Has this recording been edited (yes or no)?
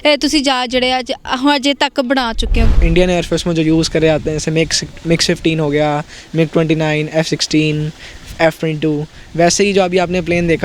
yes